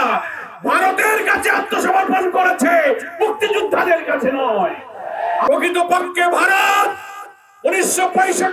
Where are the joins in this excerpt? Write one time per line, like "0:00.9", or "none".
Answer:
0:05.4